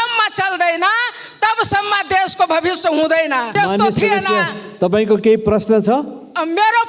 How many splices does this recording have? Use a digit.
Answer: 1